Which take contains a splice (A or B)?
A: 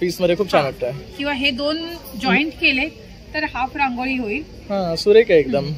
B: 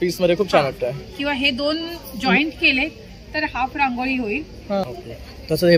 B